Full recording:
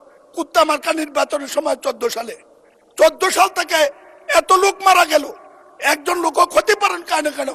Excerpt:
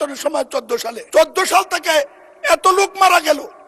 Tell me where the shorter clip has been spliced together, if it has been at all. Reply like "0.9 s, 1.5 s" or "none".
1.0 s